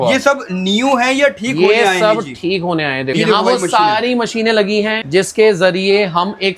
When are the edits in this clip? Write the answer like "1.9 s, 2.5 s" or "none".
3.2 s, 5.0 s